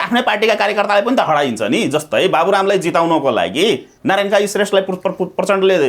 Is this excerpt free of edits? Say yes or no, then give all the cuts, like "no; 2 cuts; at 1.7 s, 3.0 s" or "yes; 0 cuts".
no; 1 cut; at 3.9 s